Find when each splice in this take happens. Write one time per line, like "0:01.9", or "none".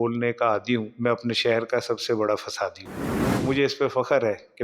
0:00.9
0:03.4